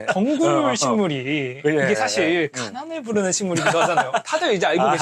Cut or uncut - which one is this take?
uncut